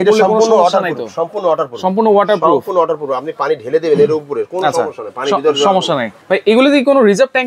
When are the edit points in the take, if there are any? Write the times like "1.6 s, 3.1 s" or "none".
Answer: none